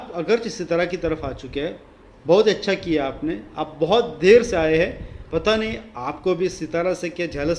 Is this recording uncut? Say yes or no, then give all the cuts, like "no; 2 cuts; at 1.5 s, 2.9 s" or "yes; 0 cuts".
no; 1 cut; at 5.2 s